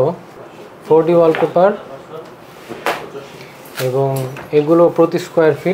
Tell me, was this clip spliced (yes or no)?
no